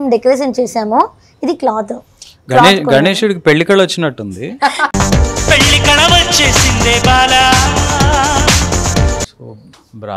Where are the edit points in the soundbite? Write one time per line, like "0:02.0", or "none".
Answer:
0:09.3